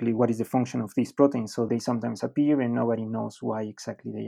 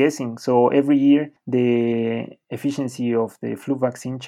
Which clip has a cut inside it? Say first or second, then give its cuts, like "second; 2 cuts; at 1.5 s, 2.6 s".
second; 1 cut; at 1.9 s